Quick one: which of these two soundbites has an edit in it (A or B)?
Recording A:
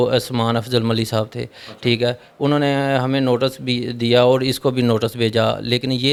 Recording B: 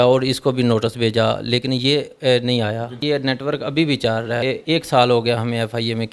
B